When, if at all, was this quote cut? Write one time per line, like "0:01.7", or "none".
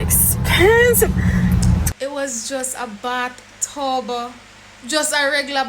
0:01.9